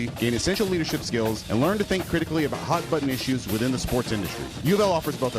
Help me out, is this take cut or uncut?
uncut